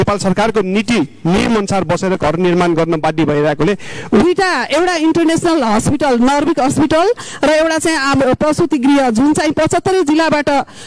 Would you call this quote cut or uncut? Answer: cut